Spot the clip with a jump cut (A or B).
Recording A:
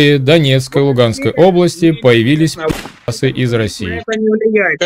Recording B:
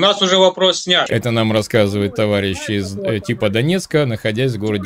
B